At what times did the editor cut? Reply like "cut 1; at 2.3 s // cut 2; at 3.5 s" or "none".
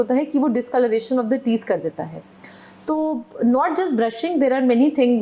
none